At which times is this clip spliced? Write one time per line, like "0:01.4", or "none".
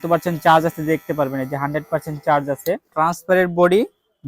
0:02.9